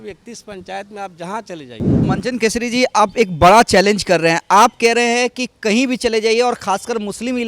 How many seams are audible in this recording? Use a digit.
1